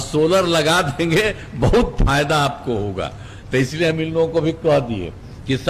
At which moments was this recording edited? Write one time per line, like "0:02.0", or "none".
none